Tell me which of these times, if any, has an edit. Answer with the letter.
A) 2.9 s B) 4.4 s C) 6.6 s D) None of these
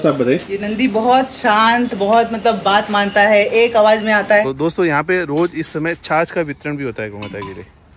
B